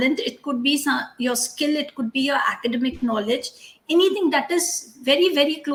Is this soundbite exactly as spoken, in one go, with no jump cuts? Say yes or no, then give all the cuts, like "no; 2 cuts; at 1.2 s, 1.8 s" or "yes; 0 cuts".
yes; 0 cuts